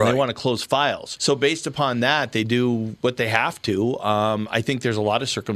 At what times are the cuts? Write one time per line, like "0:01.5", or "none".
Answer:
none